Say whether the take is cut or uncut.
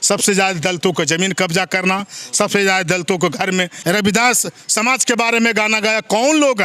cut